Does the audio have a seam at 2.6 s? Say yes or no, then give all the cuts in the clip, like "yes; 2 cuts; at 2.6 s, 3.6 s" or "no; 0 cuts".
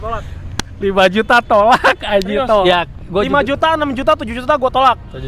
yes; 1 cut; at 2.6 s